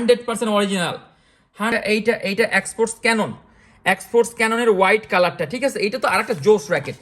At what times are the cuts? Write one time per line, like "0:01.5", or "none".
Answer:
0:01.7